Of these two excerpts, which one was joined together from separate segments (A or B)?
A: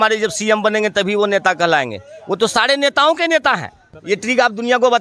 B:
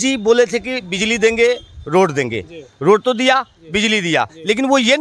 A